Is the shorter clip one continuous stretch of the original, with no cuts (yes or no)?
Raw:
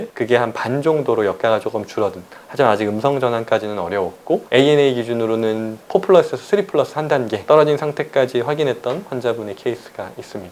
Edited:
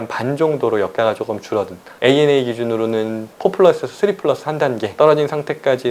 no